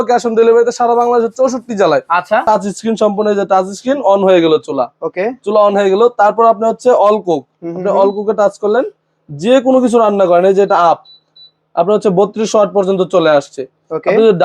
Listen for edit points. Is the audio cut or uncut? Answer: cut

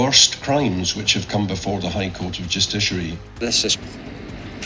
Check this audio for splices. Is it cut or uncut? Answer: cut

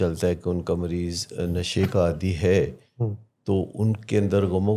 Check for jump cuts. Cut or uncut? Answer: uncut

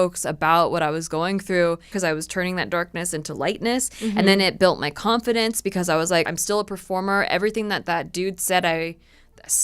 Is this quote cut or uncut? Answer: cut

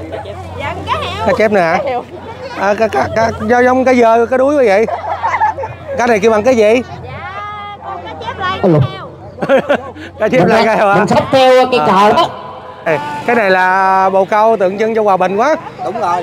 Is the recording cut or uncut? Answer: cut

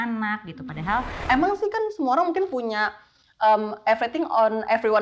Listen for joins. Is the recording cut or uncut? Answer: cut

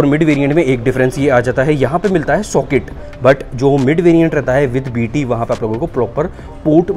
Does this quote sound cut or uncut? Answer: uncut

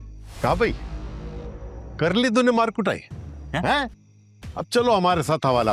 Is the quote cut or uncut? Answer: uncut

